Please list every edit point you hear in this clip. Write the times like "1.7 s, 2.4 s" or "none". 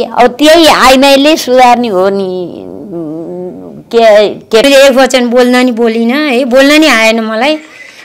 4.6 s